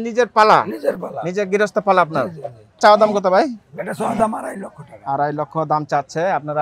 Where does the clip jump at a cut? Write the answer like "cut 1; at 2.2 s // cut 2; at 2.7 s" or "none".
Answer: cut 1; at 2.8 s

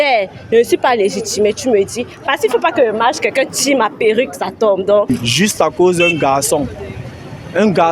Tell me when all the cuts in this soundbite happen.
cut 1; at 5.1 s

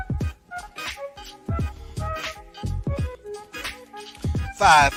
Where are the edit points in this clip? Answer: none

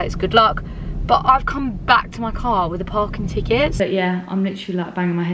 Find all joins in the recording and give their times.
cut 1; at 3.7 s

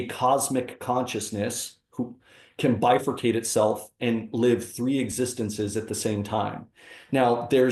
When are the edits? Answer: none

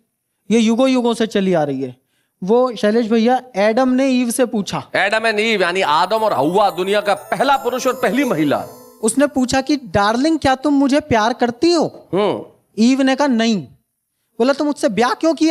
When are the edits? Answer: none

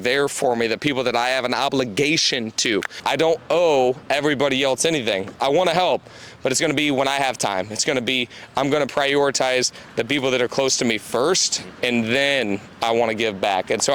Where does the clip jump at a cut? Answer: cut 1; at 3.0 s

